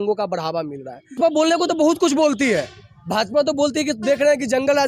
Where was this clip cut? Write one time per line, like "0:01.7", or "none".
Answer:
0:01.1